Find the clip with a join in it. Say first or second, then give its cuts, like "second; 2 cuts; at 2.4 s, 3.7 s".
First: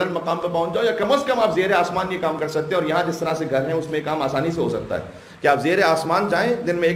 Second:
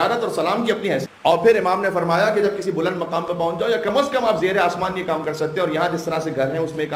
second; 1 cut; at 1.1 s